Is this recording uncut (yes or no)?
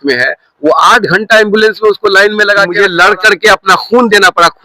no